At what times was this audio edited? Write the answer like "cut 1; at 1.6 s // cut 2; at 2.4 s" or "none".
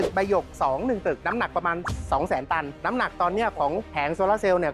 cut 1; at 1.2 s // cut 2; at 2.7 s // cut 3; at 3.9 s